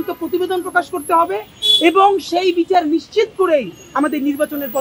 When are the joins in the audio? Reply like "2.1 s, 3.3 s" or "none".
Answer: none